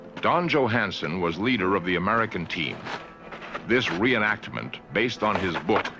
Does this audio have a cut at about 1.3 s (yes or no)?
yes